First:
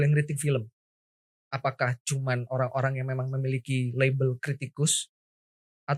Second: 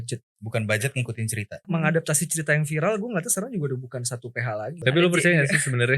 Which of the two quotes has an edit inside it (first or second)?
second